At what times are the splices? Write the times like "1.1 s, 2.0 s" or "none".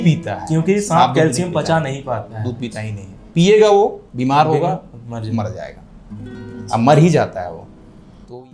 none